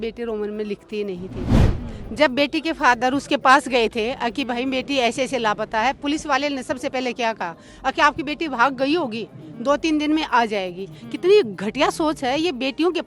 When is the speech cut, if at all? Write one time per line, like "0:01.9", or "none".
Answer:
0:01.7